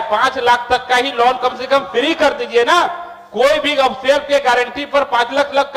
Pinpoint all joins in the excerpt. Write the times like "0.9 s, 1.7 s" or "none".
none